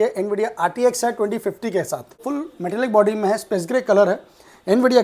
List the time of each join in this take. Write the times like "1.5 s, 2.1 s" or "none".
2.2 s